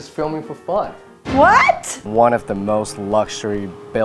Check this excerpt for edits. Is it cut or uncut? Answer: cut